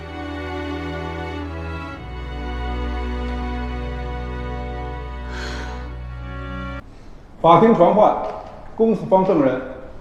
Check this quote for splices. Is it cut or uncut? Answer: cut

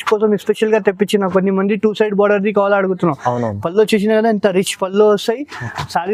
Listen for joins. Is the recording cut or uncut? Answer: uncut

